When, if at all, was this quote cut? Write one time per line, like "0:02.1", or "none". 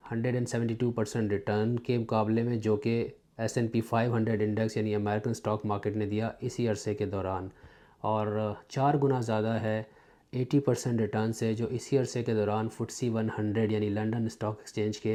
none